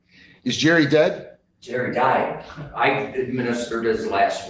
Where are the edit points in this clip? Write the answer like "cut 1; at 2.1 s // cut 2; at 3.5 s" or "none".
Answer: none